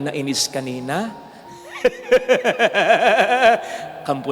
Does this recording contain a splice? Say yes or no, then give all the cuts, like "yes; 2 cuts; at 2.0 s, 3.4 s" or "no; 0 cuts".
no; 0 cuts